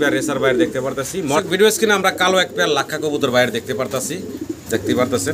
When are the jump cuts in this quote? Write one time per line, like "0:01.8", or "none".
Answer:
0:01.4